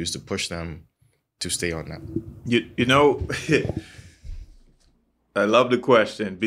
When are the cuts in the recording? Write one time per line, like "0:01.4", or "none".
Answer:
none

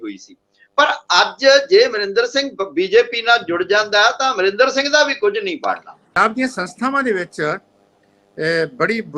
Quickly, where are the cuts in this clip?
0:06.0

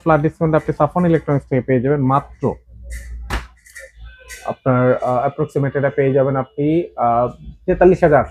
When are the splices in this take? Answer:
none

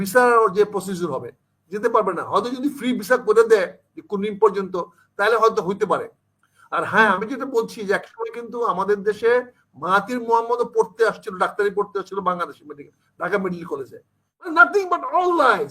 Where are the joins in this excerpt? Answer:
0:14.5

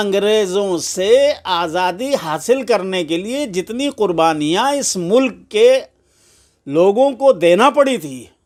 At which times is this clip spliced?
none

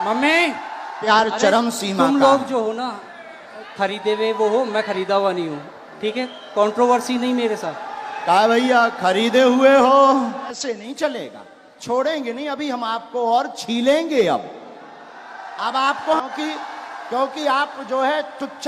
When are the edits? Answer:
0:01.0
0:10.6
0:16.2

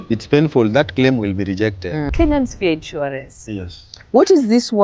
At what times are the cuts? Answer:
0:02.0

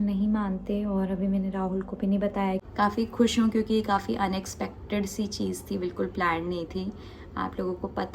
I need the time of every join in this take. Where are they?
0:02.7

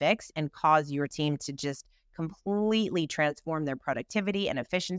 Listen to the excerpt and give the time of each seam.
none

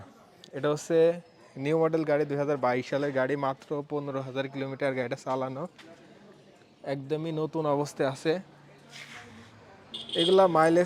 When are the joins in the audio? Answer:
none

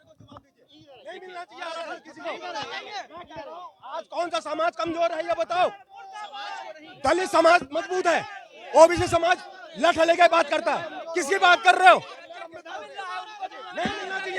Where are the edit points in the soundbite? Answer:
none

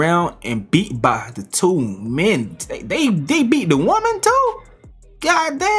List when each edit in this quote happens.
none

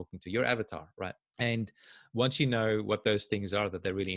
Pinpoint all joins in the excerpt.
0:01.2

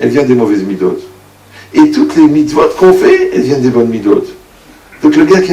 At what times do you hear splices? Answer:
none

